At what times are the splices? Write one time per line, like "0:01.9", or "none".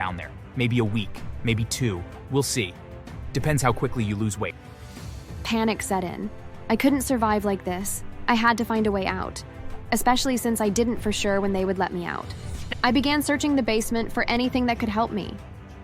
0:12.8

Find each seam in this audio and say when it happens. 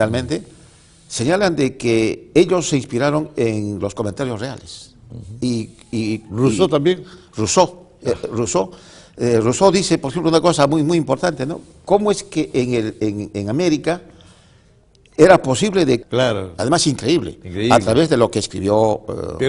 none

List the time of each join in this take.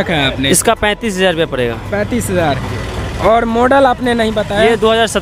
none

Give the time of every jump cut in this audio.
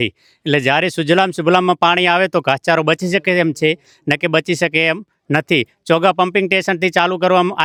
none

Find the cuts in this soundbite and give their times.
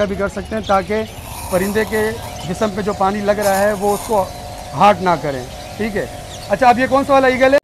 none

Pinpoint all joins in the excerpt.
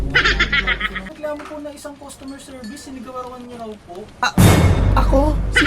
0:01.1

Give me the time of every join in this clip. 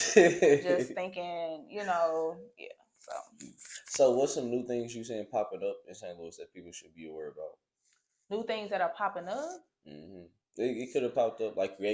none

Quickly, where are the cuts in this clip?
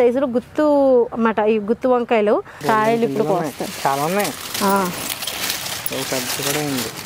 0:02.5

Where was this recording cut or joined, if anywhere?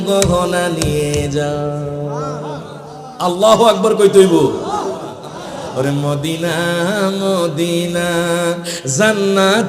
0:05.2

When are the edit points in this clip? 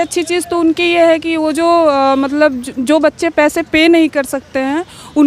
none

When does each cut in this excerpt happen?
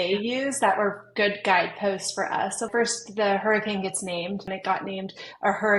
0:02.7
0:04.5

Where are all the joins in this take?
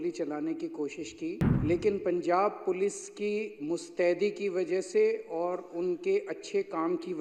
0:01.5

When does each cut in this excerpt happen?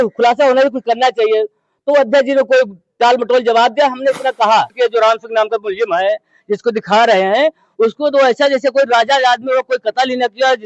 0:04.7

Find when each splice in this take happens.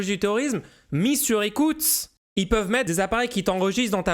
0:02.9

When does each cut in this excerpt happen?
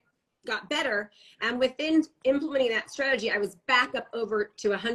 none

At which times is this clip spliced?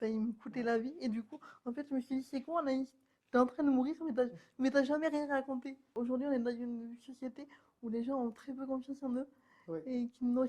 0:05.9

